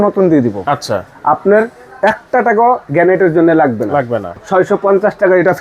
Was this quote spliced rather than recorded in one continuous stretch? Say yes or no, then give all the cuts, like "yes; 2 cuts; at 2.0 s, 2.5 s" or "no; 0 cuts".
yes; 1 cut; at 4.4 s